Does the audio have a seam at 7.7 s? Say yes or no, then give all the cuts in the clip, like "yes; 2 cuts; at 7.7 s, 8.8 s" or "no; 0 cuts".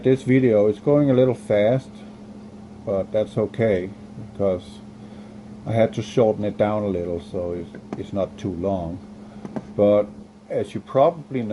yes; 1 cut; at 7.7 s